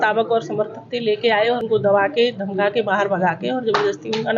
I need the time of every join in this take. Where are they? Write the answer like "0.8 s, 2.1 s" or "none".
1.6 s